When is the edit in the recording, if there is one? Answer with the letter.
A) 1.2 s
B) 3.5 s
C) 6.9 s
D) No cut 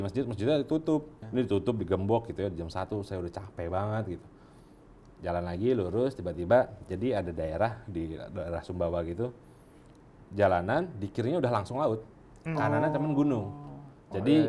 A